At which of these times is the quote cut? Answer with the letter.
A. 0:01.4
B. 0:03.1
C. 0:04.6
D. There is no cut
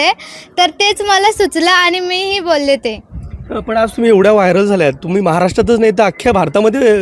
D